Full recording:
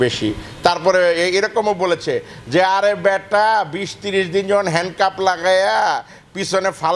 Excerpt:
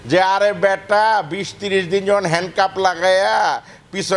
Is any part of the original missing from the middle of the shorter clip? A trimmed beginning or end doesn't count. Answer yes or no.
no